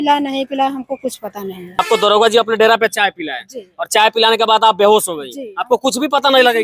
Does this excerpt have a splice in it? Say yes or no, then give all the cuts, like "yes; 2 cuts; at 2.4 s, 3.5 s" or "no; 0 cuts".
yes; 1 cut; at 1.8 s